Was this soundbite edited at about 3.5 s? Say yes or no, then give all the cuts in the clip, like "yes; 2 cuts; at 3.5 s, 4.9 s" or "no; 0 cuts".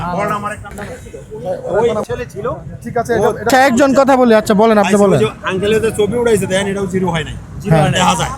yes; 1 cut; at 3.5 s